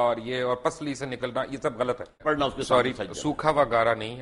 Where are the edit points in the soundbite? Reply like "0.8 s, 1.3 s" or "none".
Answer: 2.2 s